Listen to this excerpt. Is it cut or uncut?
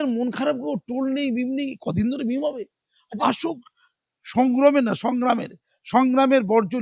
cut